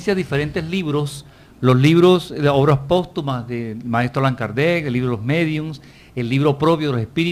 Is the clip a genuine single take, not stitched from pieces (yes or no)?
yes